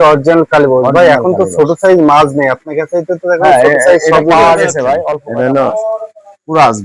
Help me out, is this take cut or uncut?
cut